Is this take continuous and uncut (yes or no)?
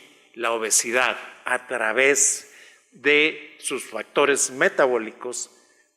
no